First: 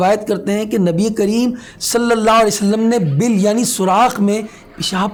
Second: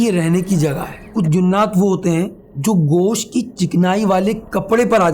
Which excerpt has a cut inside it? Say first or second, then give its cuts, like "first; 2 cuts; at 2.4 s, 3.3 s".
second; 2 cuts; at 1.0 s, 2.4 s